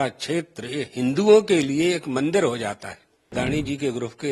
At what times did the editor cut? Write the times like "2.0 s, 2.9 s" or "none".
3.2 s